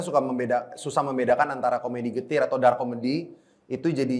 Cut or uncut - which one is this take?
uncut